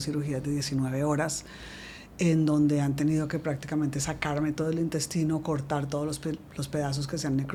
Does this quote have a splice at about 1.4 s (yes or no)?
no